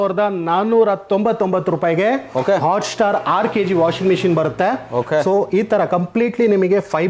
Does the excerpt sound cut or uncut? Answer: uncut